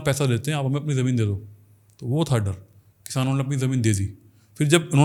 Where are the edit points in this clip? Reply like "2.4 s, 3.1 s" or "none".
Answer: none